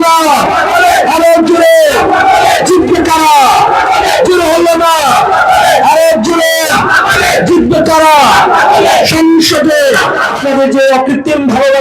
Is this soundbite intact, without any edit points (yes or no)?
no